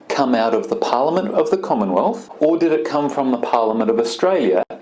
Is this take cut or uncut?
cut